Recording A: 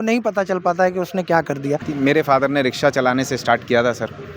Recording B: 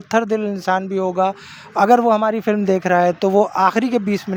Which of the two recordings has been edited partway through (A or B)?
A